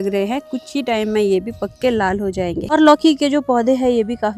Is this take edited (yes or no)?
yes